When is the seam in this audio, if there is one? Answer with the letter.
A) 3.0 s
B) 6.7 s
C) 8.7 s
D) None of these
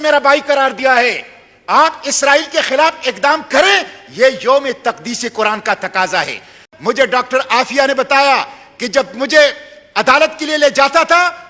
B